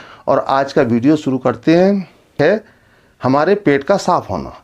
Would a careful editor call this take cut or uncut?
cut